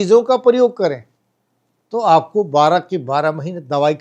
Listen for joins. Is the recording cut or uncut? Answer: uncut